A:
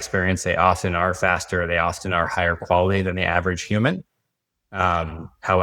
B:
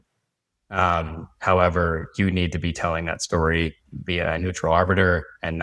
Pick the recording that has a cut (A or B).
B